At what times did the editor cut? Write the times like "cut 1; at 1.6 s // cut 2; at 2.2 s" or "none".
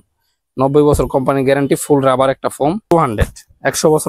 cut 1; at 2.9 s